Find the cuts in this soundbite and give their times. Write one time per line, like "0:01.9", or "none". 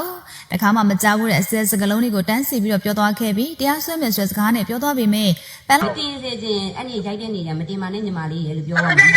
0:05.8